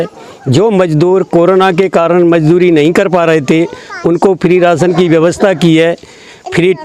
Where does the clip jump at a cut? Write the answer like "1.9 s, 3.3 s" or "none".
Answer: none